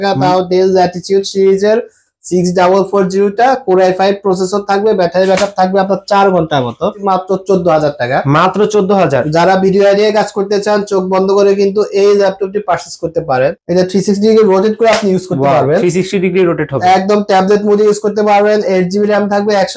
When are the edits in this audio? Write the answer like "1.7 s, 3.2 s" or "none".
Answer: 7.0 s, 13.6 s